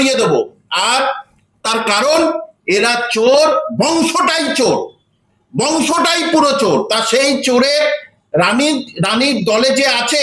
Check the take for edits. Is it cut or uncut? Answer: uncut